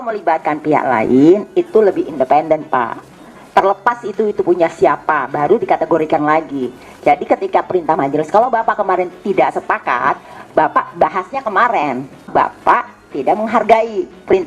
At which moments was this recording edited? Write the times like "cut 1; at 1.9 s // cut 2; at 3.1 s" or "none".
cut 1; at 12.3 s